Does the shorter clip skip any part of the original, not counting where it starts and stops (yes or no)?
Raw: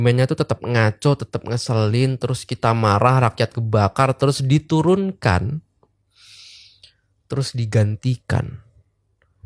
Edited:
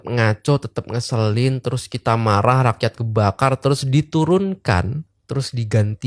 yes